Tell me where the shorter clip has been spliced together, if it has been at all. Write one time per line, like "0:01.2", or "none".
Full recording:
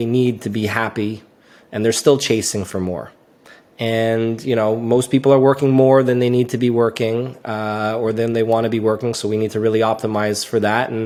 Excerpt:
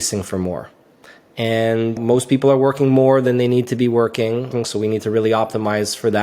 0:02.0
0:04.5

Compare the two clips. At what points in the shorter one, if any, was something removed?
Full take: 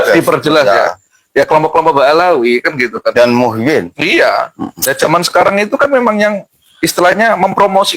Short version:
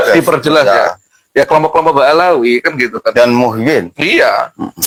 none

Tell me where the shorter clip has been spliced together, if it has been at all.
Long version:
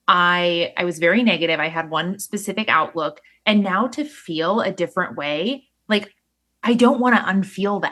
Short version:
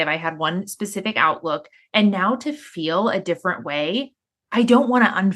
0:04.2

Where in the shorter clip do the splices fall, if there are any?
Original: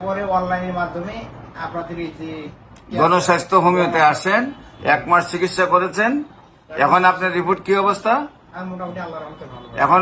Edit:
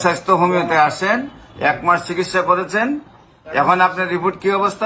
none

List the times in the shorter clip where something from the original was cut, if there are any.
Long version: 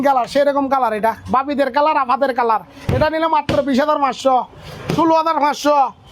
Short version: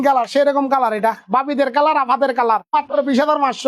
0:02.7

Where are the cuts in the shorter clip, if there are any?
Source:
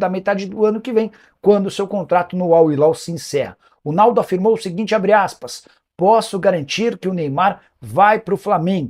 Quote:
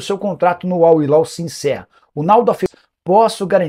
0:02.6

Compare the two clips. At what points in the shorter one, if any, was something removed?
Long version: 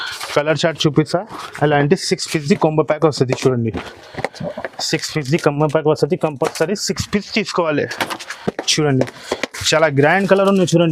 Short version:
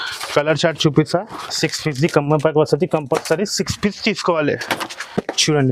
0:01.4

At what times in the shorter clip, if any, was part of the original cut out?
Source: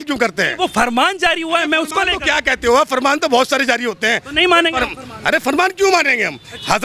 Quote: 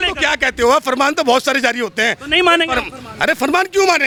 none

